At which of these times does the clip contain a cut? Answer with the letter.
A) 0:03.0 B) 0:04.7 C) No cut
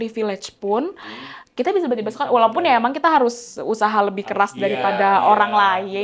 C